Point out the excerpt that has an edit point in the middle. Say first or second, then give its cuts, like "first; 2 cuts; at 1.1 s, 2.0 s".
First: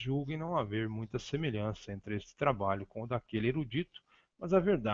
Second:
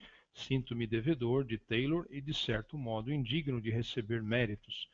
first; 1 cut; at 2.0 s